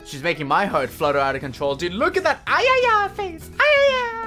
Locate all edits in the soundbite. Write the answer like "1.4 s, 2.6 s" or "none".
none